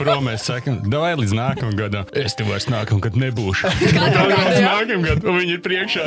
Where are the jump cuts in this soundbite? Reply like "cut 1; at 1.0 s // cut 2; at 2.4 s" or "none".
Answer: cut 1; at 2.0 s